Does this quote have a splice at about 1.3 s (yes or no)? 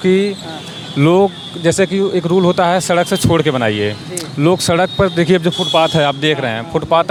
no